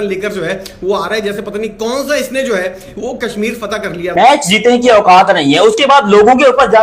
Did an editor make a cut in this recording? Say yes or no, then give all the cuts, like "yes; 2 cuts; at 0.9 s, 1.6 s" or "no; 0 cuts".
yes; 1 cut; at 4.1 s